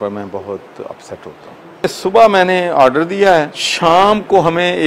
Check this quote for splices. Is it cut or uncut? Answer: cut